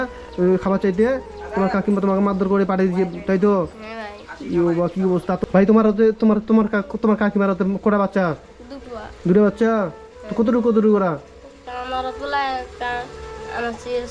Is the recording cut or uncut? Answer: uncut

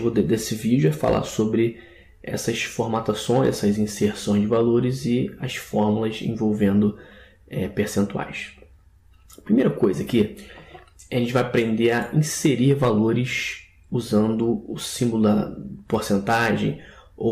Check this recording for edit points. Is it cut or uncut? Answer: cut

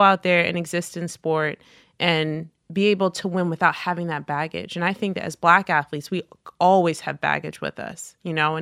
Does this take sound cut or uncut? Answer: cut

